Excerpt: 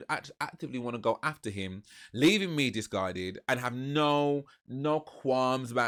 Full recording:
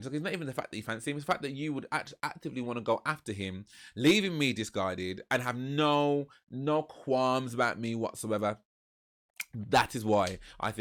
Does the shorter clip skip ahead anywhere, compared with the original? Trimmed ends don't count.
no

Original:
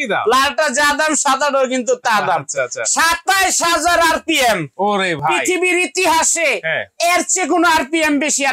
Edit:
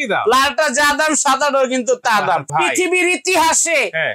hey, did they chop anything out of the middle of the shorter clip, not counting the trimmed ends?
yes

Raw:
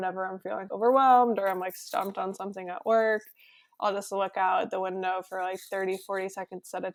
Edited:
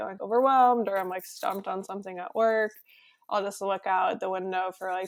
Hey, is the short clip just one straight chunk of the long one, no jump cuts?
yes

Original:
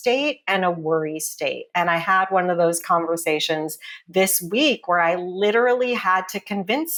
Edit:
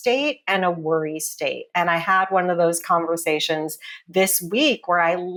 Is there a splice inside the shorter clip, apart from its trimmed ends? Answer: no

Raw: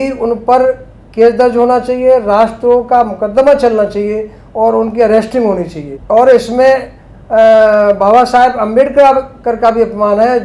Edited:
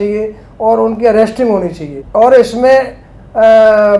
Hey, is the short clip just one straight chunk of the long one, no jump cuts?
yes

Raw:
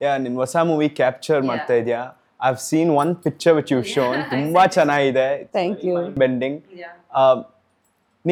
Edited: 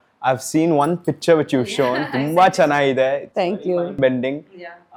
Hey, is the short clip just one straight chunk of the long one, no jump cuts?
yes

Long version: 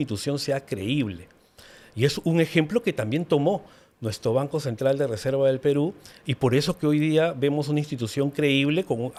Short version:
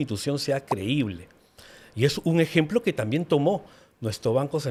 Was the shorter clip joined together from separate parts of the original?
no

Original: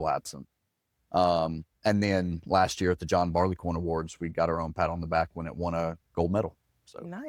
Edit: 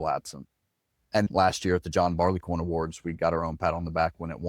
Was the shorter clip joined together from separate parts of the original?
yes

